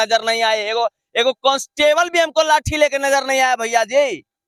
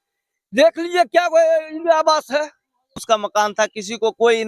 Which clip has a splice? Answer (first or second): second